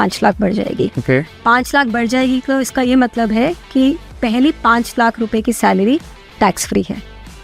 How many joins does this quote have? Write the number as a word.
zero